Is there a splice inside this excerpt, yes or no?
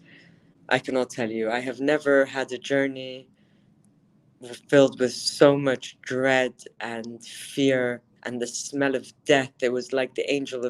no